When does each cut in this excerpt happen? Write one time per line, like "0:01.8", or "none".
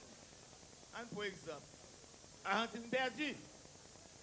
none